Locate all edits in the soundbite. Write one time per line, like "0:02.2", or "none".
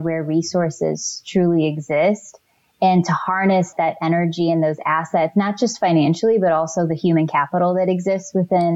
none